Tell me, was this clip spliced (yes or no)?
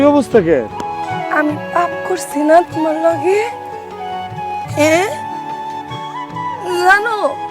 no